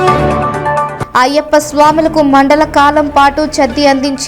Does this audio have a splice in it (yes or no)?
yes